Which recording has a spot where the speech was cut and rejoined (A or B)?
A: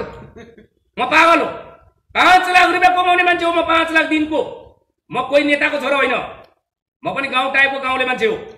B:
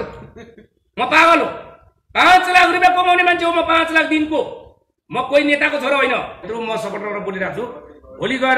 B